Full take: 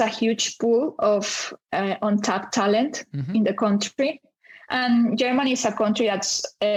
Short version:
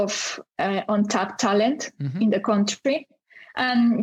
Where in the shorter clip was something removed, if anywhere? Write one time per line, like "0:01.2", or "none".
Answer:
none